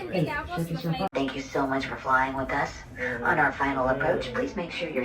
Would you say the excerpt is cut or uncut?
cut